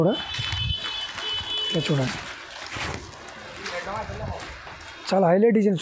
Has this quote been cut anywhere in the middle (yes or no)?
no